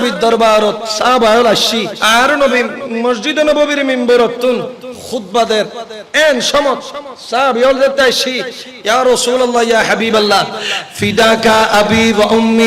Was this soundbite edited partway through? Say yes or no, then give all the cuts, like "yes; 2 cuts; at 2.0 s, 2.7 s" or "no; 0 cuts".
yes; 2 cuts; at 0.9 s, 1.9 s